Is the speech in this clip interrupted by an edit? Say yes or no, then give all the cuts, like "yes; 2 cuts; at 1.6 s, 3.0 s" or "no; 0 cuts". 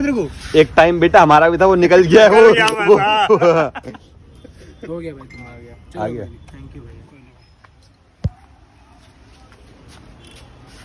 no; 0 cuts